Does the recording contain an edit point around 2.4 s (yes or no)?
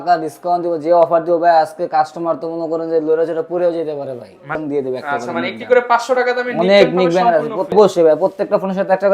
no